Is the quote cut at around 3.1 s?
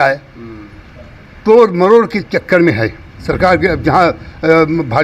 yes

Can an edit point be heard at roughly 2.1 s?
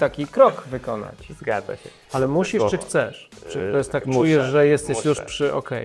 yes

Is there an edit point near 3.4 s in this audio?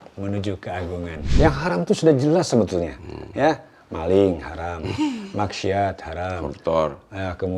no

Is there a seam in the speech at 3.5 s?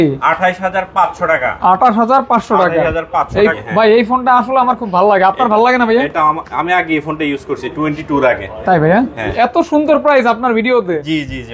yes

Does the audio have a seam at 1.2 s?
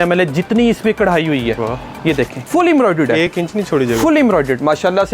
no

